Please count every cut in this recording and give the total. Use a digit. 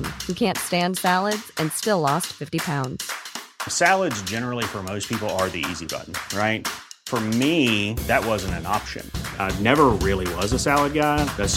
0